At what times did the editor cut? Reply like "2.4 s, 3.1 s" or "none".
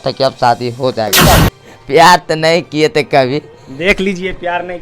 1.2 s

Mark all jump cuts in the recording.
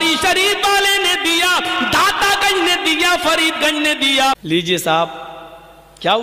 4.4 s

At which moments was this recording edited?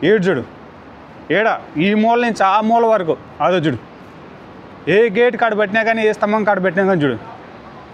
none

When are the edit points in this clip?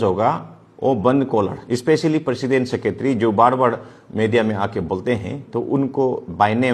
1.6 s

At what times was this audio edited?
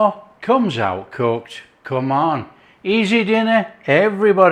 none

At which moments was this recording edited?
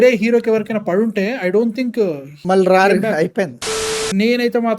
2.3 s, 3.7 s

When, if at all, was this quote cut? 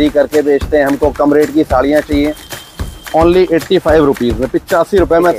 none

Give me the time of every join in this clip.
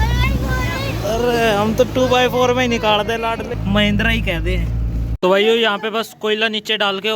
5.2 s

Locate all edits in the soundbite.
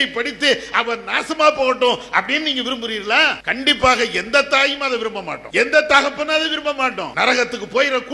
3.4 s, 5.3 s, 7.0 s

